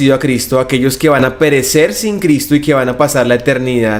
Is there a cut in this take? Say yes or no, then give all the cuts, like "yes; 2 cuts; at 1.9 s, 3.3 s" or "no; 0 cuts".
no; 0 cuts